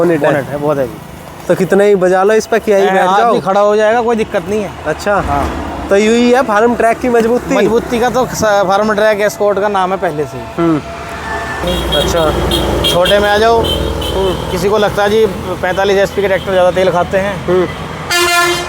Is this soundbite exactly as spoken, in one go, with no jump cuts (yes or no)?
no